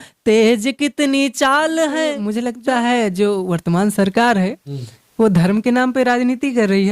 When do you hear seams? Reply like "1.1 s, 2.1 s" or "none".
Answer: 2.3 s